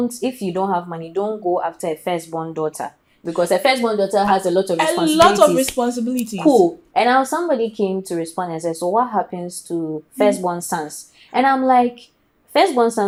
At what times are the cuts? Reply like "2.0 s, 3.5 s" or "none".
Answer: none